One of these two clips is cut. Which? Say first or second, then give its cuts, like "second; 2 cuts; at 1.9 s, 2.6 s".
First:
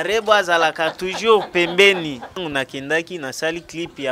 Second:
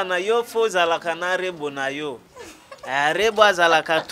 first; 1 cut; at 2.4 s